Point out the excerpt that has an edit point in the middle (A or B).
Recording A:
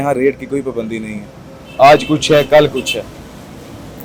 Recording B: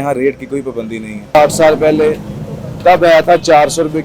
B